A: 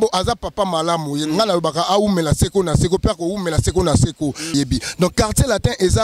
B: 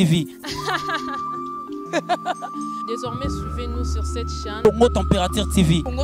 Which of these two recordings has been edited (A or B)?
A